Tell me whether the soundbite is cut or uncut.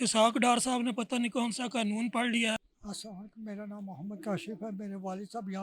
uncut